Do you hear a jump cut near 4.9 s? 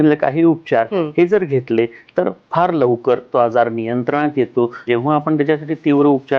yes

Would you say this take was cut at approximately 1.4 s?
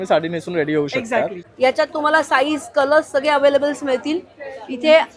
yes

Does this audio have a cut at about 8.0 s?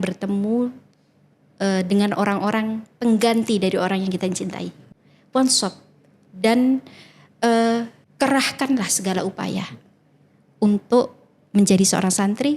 yes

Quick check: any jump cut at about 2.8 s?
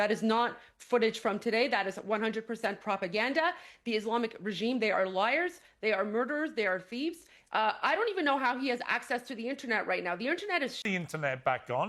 no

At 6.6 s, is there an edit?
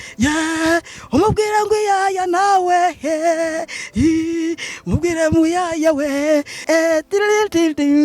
yes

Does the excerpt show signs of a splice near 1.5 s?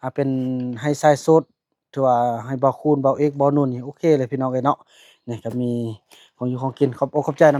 no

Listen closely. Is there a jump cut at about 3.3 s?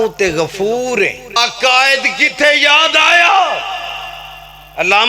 no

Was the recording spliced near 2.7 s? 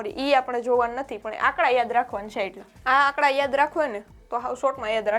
yes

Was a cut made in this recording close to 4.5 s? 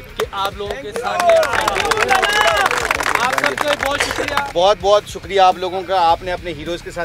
yes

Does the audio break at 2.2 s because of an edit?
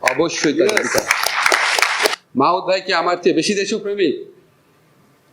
yes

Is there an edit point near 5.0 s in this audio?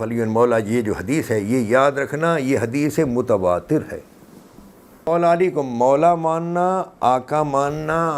yes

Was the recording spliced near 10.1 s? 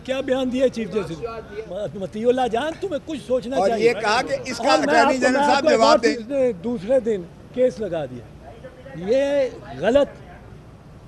no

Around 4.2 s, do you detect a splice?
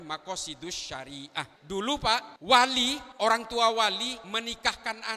yes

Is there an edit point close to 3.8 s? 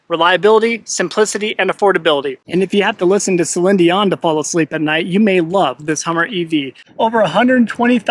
no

